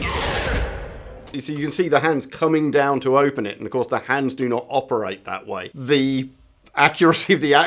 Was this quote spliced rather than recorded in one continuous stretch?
yes; 2 cuts; at 1.2 s, 5.8 s

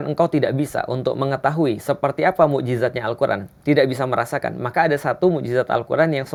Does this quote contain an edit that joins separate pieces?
no; 0 cuts

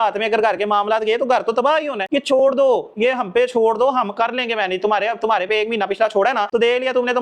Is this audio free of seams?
yes; 0 cuts

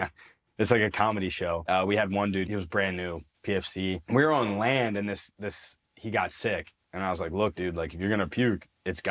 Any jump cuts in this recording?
yes; 4 cuts; at 1.6 s, 2.5 s, 4.0 s, 6.8 s

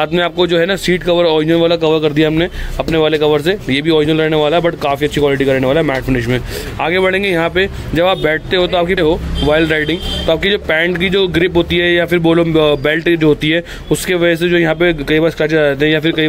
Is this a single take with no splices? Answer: yes; 0 cuts

